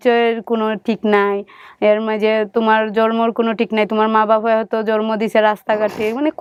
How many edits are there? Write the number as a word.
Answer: zero